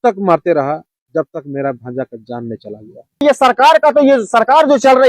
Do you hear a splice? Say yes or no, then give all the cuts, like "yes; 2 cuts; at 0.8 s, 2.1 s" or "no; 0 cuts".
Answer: yes; 1 cut; at 3.2 s